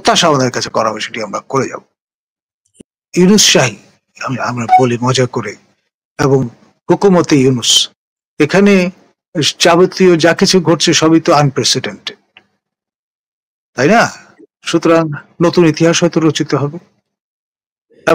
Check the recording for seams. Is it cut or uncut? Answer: cut